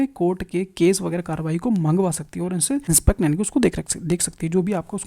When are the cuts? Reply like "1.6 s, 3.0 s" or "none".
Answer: 2.8 s